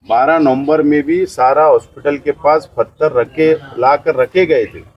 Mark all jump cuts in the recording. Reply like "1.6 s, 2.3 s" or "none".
none

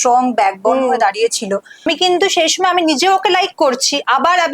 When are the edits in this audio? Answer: 1.8 s

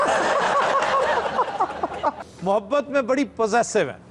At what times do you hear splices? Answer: 2.2 s

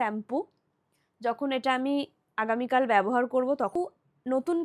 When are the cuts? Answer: 3.8 s

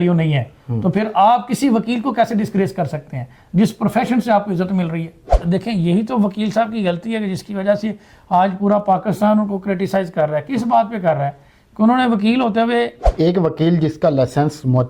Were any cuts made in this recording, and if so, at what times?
5.4 s, 13.0 s

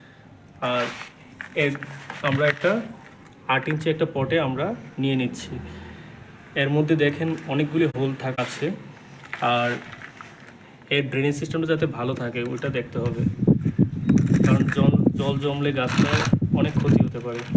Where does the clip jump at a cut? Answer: 8.2 s

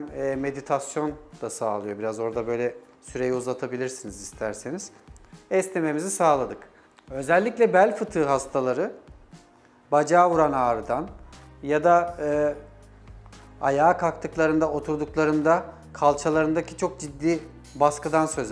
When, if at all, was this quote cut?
none

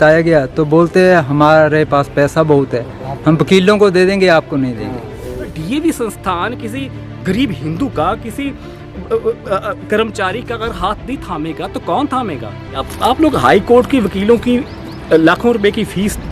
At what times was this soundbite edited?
5.6 s, 12.9 s

